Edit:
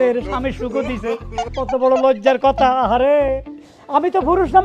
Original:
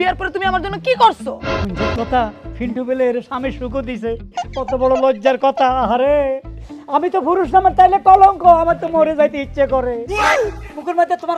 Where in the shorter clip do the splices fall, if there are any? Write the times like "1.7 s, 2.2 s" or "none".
none